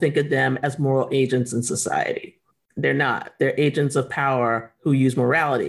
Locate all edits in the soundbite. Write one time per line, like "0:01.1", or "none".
none